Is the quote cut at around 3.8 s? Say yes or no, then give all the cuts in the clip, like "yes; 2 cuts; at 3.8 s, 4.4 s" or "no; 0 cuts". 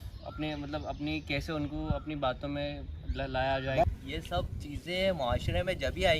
yes; 1 cut; at 3.8 s